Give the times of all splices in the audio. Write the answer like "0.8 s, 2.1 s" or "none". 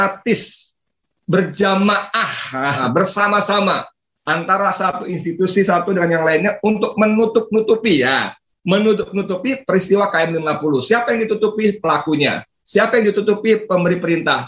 2.8 s